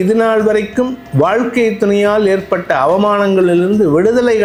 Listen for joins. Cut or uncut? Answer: uncut